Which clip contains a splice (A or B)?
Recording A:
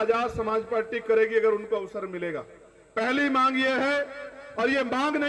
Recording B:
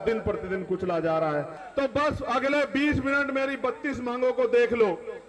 B